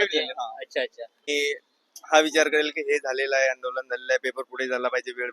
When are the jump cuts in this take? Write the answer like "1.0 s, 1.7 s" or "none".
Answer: 1.3 s